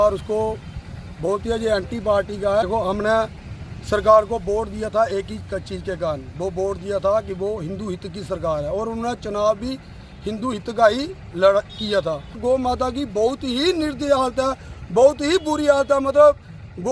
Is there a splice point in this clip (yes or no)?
yes